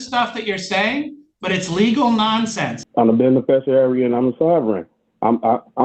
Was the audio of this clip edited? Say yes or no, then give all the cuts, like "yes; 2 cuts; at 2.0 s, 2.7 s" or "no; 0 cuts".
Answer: yes; 1 cut; at 2.8 s